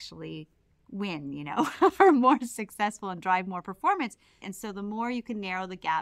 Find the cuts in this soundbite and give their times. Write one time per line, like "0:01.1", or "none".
0:04.4